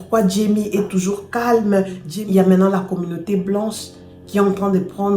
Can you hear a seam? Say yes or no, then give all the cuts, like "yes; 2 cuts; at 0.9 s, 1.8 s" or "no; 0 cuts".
yes; 1 cut; at 2.1 s